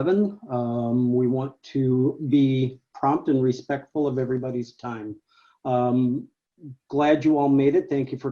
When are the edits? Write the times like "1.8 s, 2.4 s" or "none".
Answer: none